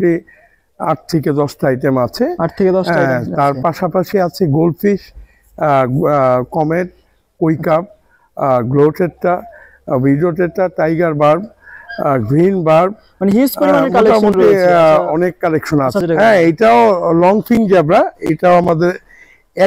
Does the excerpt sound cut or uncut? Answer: cut